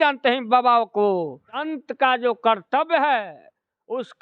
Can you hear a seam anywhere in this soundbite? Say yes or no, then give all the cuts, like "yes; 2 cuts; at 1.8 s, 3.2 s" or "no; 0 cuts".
yes; 1 cut; at 1.7 s